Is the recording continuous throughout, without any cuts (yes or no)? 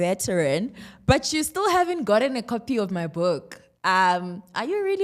yes